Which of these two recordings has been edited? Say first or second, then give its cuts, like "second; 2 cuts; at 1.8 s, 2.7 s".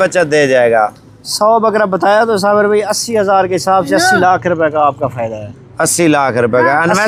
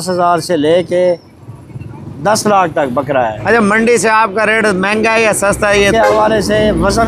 second; 2 cuts; at 3.4 s, 5.9 s